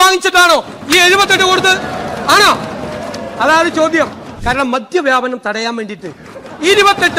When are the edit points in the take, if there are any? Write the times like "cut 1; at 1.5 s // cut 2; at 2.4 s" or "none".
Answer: cut 1; at 4.3 s